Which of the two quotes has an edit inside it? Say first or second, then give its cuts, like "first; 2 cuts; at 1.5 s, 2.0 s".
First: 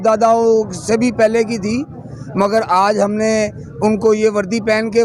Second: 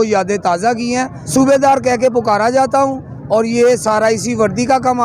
second; 1 cut; at 1.2 s